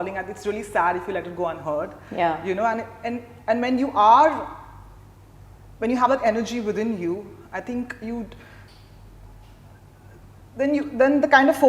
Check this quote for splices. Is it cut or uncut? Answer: uncut